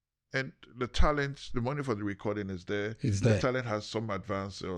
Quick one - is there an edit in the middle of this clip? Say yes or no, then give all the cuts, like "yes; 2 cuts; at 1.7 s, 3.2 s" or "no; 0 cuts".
no; 0 cuts